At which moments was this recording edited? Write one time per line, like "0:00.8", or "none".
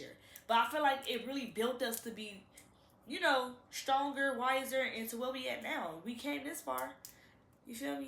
none